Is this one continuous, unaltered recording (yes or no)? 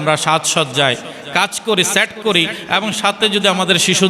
yes